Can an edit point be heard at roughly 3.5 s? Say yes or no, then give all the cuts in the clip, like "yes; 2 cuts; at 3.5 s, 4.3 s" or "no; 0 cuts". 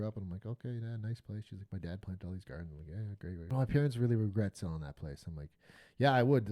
yes; 1 cut; at 3.5 s